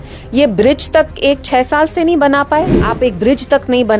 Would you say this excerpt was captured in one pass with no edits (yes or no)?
no